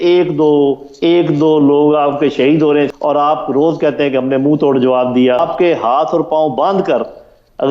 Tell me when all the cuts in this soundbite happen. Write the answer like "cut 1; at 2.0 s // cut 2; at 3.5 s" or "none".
cut 1; at 2.9 s // cut 2; at 5.5 s